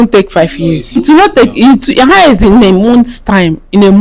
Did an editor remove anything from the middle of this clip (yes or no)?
yes